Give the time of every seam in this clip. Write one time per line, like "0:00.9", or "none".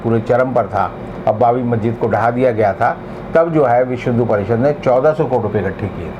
none

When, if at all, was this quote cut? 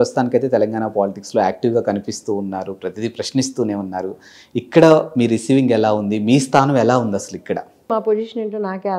0:07.9

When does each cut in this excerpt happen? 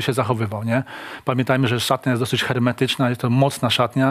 none

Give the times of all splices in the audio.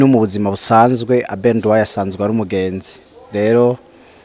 none

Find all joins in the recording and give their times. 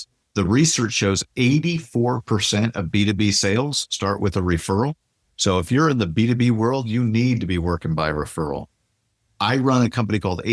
none

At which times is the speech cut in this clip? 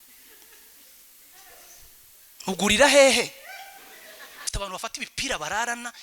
0:04.4

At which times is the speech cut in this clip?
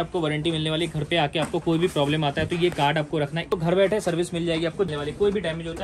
0:03.5
0:04.9

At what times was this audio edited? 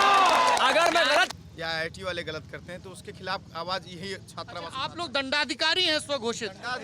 0:01.3

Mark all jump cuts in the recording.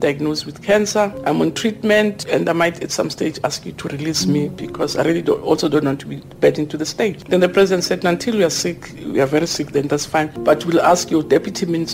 0:01.2
0:02.2
0:07.2
0:10.3

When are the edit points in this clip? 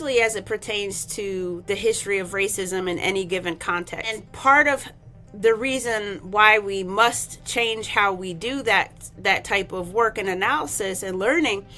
0:04.3

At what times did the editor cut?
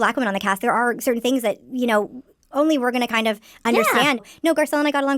0:04.2

